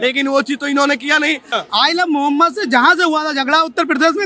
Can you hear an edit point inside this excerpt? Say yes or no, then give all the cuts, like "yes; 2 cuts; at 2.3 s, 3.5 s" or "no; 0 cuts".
yes; 1 cut; at 1.5 s